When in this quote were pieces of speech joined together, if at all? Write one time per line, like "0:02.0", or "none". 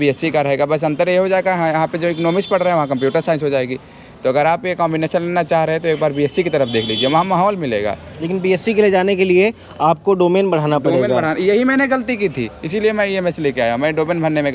none